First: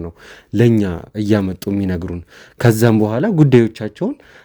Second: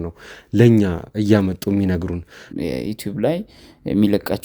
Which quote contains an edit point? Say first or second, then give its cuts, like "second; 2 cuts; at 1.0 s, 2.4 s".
second; 1 cut; at 2.5 s